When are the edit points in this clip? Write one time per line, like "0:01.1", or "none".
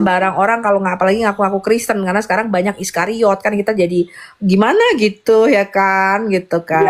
none